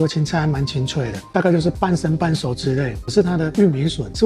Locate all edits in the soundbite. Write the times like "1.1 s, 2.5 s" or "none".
1.3 s, 3.0 s